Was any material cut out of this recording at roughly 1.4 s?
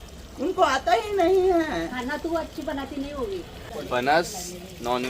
no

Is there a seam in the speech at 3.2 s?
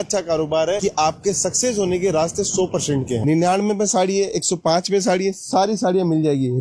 yes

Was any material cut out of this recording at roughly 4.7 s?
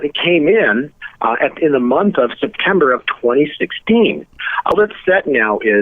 yes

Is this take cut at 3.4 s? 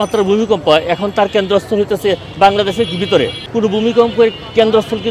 yes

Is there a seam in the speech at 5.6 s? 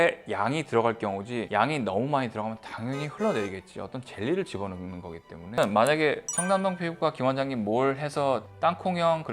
yes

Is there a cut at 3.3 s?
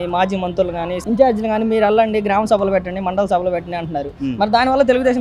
no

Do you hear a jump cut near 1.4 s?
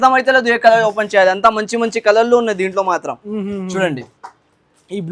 no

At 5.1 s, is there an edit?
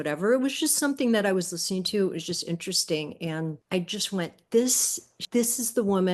yes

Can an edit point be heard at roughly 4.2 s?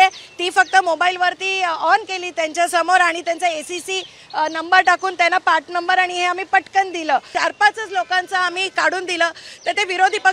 no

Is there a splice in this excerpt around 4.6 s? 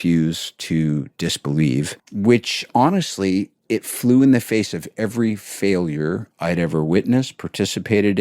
no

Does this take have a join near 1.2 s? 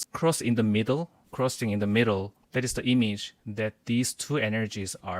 yes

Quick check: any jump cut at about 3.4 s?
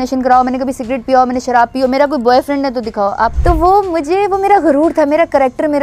yes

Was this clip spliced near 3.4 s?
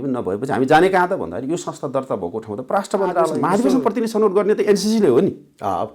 yes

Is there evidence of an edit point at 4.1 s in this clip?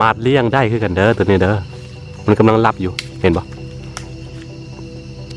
yes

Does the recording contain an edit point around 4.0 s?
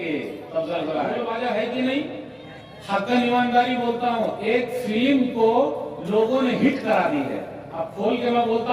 no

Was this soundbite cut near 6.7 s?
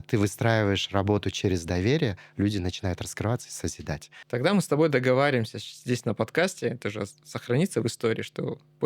no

